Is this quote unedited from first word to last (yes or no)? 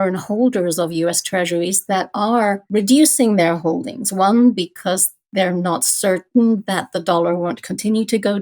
no